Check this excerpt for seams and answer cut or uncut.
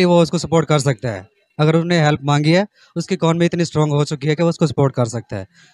uncut